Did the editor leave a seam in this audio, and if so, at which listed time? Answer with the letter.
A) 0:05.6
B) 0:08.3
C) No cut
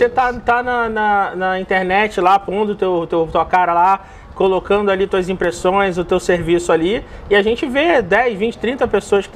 C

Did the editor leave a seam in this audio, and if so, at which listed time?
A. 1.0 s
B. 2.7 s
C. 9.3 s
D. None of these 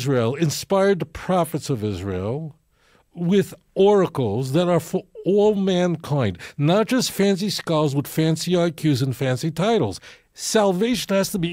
D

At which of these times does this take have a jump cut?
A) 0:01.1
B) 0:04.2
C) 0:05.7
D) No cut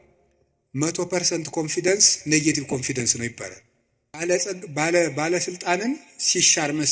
B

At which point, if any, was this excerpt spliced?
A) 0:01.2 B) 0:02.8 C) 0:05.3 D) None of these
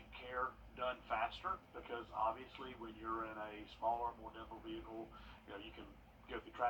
D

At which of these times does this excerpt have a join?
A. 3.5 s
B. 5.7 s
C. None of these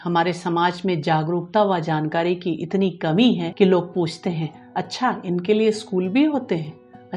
A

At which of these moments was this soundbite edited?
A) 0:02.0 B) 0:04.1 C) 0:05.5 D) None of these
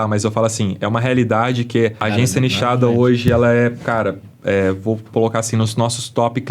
A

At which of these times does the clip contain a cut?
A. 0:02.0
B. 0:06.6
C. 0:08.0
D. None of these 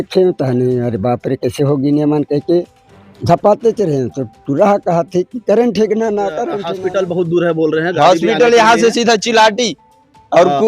B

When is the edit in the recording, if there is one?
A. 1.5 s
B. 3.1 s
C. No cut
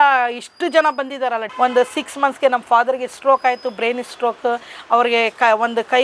A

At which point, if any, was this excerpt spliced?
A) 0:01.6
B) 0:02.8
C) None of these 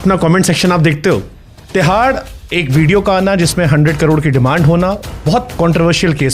A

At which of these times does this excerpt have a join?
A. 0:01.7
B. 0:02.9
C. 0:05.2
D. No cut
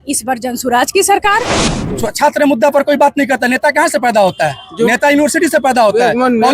A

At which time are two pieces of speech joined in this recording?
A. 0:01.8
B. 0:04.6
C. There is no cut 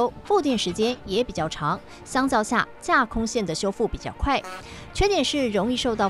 C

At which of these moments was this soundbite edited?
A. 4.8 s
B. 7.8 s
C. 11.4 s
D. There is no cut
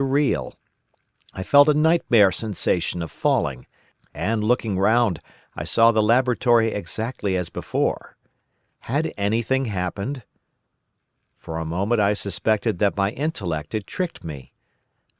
C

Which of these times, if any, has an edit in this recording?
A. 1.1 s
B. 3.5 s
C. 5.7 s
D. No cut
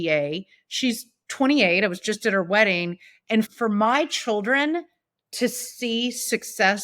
B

